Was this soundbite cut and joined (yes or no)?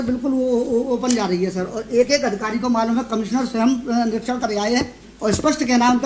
no